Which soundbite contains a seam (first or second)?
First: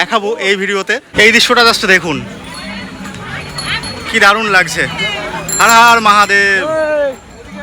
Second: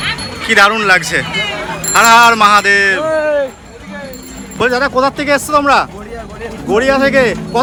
first